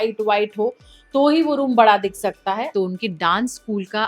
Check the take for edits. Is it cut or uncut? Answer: cut